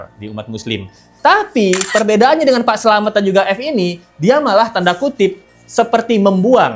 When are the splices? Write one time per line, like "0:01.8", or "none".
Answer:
none

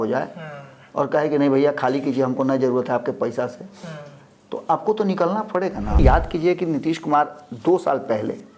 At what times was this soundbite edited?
0:06.0

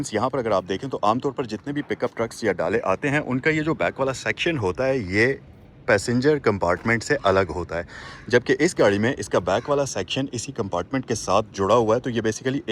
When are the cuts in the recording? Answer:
none

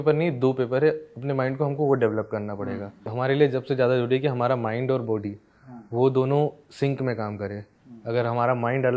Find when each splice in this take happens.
0:03.1

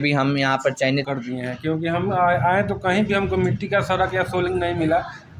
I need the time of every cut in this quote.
0:01.0

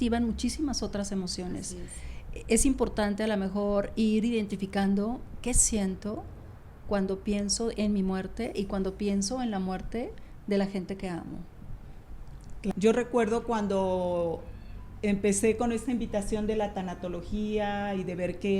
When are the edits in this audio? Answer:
0:12.7

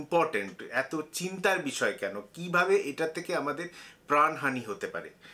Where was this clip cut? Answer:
none

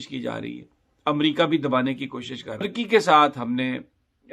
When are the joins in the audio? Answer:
0:02.7

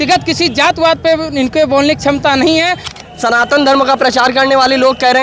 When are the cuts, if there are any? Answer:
0:02.9

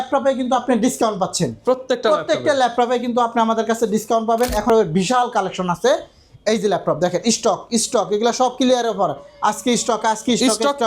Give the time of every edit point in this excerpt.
0:04.6

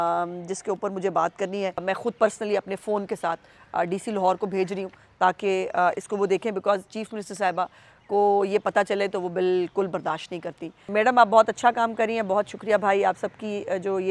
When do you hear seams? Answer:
0:01.8
0:10.9

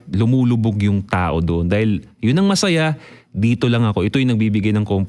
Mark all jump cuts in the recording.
none

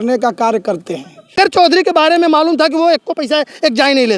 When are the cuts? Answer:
0:01.3

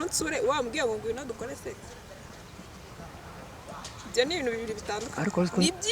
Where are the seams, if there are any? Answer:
none

